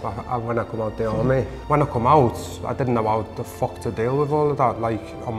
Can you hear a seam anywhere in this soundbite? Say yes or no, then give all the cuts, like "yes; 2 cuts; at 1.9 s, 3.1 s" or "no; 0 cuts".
yes; 1 cut; at 1.6 s